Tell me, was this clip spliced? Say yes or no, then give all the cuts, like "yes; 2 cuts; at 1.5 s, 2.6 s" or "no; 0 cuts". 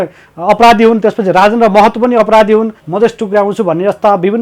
yes; 1 cut; at 2.8 s